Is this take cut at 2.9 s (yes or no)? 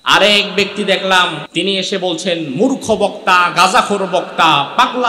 no